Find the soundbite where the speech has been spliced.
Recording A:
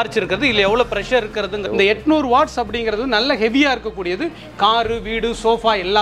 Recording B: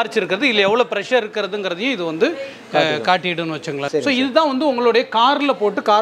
A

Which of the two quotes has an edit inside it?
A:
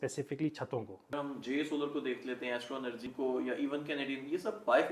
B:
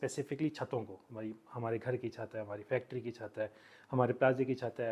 A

